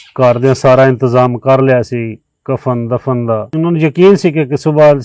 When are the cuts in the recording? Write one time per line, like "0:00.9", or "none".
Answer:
0:03.5